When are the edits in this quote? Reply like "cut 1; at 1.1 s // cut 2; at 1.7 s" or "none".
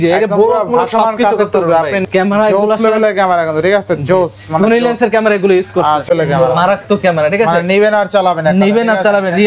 cut 1; at 2.0 s // cut 2; at 6.1 s